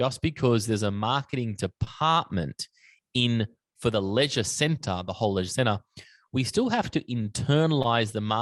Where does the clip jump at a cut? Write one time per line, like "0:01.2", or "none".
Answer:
none